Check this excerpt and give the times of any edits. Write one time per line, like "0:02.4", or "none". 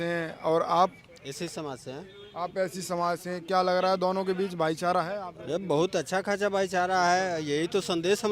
none